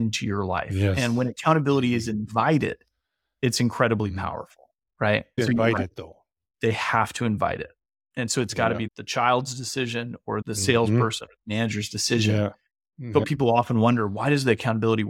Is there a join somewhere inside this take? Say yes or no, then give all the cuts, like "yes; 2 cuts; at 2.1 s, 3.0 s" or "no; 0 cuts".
yes; 1 cut; at 13.3 s